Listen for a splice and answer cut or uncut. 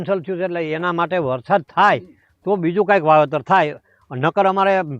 uncut